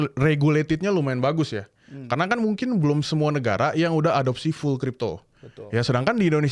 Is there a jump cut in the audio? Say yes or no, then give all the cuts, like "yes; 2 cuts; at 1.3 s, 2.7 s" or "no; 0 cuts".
no; 0 cuts